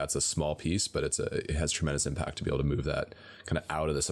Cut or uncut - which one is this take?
uncut